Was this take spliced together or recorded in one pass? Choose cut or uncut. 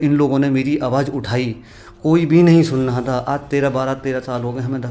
uncut